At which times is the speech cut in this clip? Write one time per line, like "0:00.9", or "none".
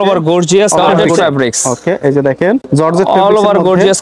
0:01.0
0:02.7